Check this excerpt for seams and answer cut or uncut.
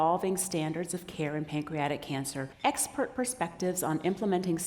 cut